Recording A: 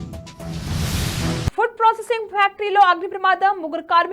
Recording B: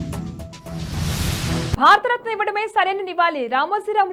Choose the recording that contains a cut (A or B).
A